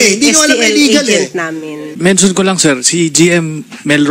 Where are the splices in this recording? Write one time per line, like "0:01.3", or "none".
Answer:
0:01.9